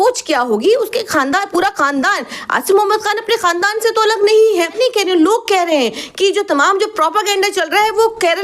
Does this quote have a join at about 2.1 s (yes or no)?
no